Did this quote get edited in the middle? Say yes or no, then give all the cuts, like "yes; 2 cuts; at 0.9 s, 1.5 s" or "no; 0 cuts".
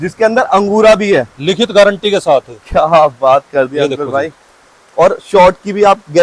no; 0 cuts